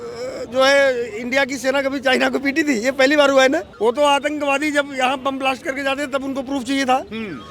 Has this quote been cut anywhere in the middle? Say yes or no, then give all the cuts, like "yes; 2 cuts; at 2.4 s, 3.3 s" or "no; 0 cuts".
yes; 1 cut; at 3.7 s